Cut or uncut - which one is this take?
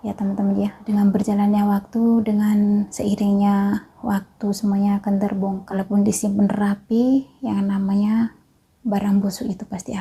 cut